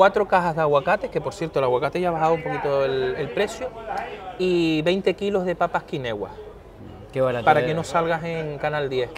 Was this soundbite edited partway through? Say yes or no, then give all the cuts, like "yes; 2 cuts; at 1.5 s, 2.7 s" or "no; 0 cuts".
no; 0 cuts